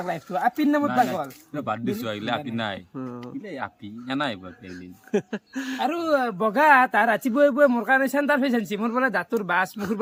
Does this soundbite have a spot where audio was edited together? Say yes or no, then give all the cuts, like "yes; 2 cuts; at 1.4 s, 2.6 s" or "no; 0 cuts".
no; 0 cuts